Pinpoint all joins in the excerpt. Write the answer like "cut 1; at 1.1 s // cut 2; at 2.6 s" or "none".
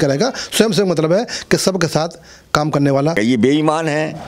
cut 1; at 3.1 s